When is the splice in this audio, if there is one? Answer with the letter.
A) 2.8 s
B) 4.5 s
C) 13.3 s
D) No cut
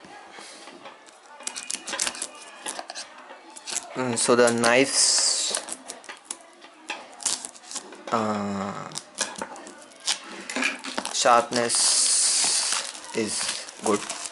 C